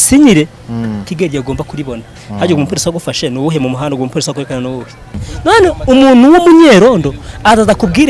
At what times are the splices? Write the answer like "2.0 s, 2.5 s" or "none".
5.3 s